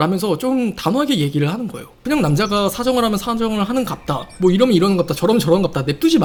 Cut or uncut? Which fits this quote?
uncut